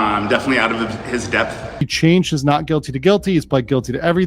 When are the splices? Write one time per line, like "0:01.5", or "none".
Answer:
0:01.8